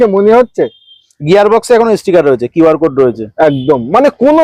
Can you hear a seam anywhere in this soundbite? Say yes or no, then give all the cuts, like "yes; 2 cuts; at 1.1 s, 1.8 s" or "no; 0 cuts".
no; 0 cuts